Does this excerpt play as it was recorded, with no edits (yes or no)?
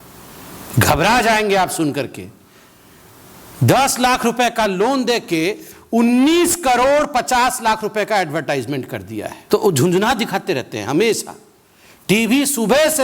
no